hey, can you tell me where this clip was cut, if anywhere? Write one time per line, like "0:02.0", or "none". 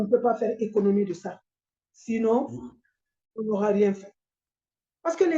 0:04.3